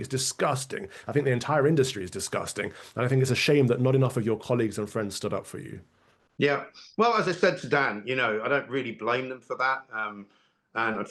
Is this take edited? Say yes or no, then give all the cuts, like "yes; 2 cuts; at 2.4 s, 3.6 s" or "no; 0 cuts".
no; 0 cuts